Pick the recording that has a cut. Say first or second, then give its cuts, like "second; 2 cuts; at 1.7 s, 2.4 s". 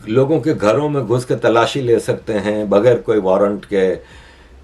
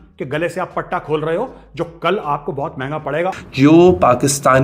second; 1 cut; at 3.4 s